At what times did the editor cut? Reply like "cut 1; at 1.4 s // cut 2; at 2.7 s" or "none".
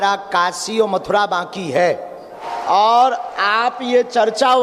cut 1; at 2.4 s